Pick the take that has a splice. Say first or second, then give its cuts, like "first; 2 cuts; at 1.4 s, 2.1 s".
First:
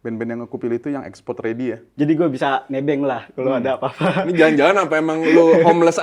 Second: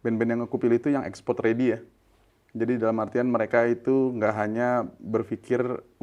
first; 1 cut; at 1.8 s